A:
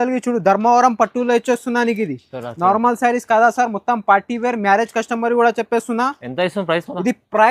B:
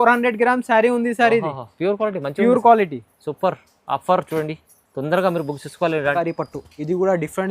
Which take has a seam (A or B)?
B